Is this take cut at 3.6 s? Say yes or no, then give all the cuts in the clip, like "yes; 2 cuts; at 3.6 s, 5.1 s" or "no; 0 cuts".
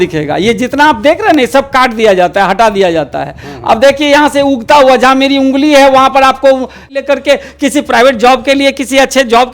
no; 1 cut; at 6.9 s